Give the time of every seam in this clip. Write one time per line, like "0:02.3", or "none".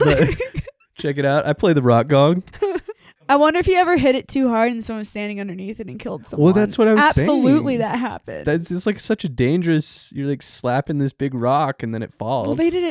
0:03.1